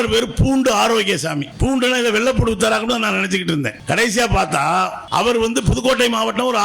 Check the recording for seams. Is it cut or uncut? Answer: cut